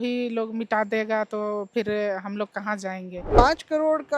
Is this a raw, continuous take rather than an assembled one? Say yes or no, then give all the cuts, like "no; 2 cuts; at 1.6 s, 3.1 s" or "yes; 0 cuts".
no; 1 cut; at 3.3 s